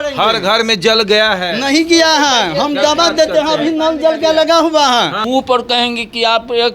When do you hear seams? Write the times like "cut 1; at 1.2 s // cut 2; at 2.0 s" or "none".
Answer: cut 1; at 5.2 s